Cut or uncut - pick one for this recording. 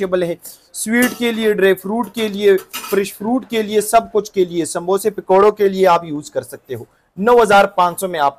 uncut